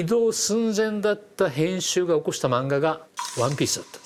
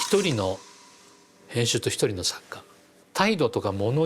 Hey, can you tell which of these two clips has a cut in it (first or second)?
second